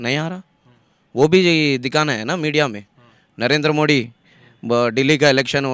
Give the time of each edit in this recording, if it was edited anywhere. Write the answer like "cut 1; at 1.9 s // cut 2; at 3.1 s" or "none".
none